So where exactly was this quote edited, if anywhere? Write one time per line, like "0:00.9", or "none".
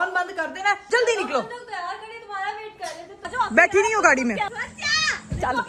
0:03.3
0:04.5

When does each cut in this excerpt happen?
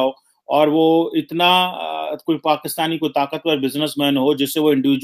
none

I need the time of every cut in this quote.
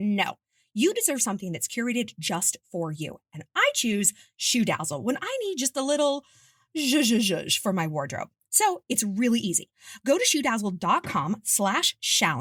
none

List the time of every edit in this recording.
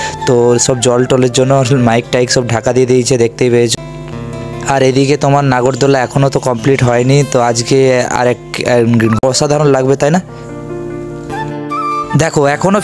0:03.7
0:09.2

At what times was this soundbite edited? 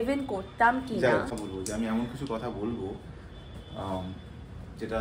0:01.3

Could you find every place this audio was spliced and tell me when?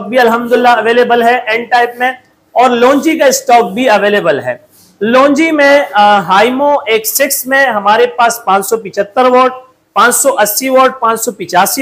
none

